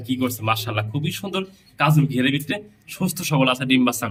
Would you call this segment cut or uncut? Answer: uncut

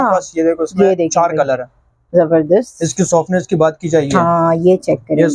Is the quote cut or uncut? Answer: uncut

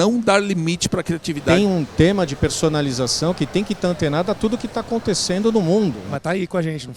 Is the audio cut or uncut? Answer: cut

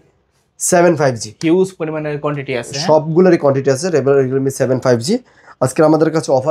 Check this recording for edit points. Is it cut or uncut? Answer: uncut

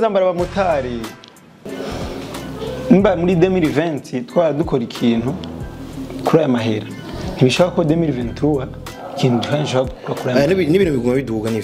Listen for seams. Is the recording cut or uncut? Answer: cut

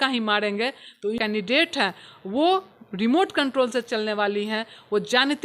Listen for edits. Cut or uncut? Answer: cut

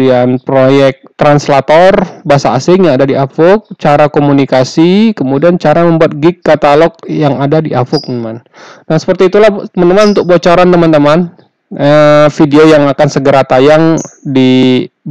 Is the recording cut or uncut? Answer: uncut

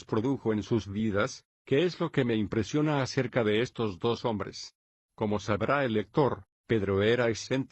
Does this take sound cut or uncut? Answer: cut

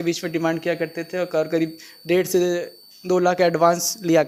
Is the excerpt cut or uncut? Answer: uncut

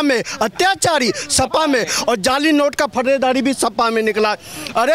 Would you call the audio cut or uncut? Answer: uncut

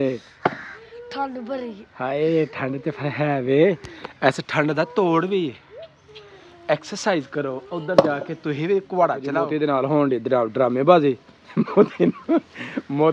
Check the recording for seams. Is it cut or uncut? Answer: cut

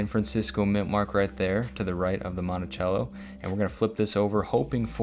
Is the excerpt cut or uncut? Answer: uncut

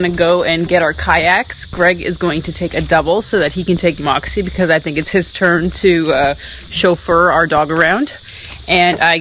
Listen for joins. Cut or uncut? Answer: uncut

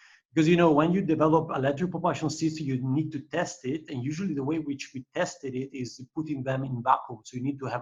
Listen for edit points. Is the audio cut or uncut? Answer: uncut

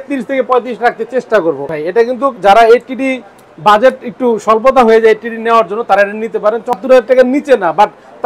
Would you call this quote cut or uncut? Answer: cut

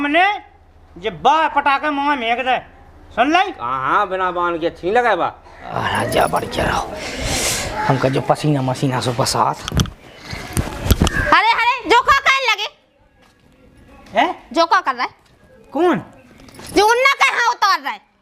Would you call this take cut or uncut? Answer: cut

